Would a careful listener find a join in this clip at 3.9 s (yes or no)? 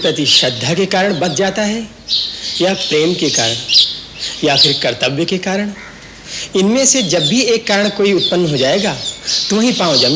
no